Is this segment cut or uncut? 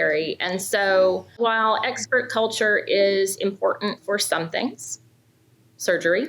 cut